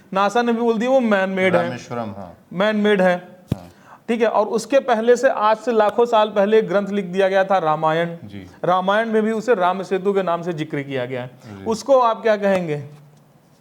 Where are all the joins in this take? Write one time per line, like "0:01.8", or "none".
none